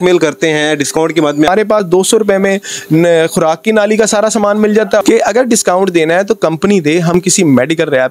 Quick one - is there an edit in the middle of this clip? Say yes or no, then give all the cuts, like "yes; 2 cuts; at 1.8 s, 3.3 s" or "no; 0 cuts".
yes; 2 cuts; at 1.5 s, 5.0 s